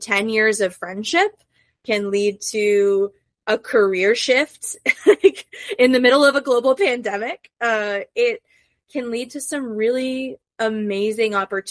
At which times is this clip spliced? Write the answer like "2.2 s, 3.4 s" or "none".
none